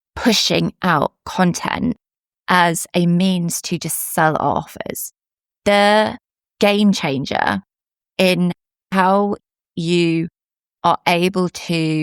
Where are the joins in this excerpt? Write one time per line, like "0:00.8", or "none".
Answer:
none